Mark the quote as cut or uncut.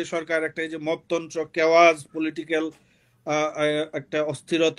uncut